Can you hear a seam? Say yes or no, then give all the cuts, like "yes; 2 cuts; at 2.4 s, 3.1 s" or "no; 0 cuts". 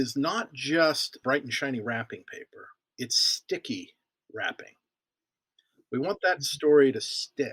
yes; 2 cuts; at 1.2 s, 2.8 s